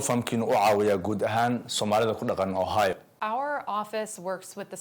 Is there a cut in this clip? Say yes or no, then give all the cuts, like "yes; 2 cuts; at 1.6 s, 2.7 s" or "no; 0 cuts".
yes; 1 cut; at 3.1 s